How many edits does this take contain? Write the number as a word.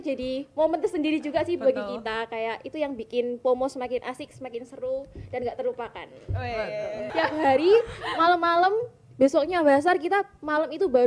one